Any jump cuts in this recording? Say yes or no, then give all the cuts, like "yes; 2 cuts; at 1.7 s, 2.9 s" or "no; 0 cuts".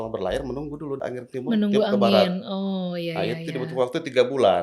yes; 1 cut; at 1.0 s